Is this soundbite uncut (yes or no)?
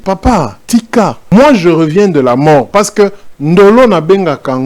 no